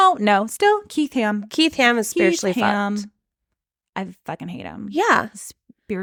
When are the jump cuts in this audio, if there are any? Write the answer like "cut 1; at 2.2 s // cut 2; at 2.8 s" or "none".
none